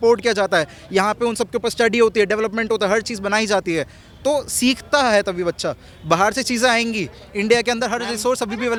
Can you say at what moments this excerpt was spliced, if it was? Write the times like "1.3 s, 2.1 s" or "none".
none